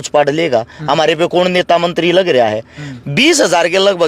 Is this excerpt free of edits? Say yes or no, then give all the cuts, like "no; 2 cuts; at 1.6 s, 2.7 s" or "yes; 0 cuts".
yes; 0 cuts